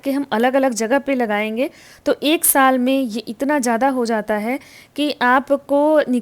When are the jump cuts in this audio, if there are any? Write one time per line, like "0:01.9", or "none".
none